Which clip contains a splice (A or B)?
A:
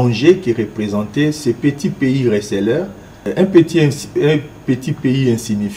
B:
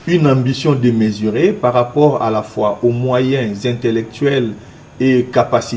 A